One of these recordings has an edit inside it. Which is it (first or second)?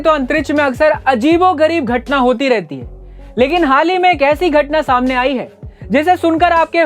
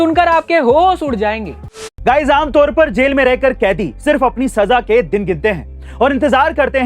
second